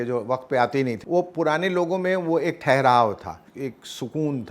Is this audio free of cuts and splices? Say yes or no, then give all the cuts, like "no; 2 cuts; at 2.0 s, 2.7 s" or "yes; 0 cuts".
no; 2 cuts; at 1.0 s, 3.5 s